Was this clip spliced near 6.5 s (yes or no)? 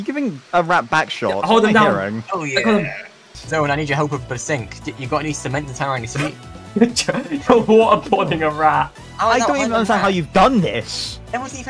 yes